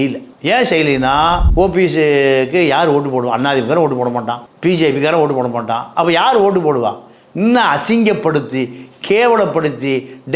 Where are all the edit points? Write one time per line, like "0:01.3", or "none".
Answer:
0:01.5